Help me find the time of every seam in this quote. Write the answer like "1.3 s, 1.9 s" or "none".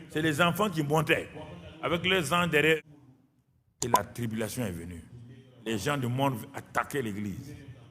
2.8 s